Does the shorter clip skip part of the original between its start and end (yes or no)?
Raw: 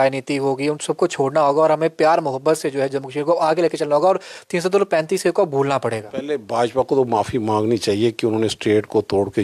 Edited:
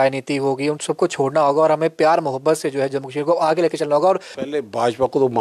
yes